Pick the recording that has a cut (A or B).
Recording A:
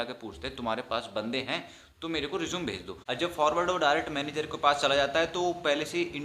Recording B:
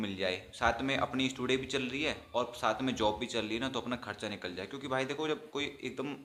A